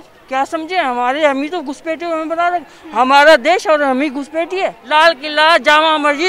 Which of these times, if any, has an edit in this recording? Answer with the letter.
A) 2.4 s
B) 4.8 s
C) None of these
B